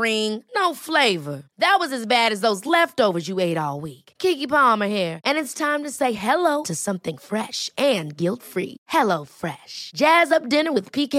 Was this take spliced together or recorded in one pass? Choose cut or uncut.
uncut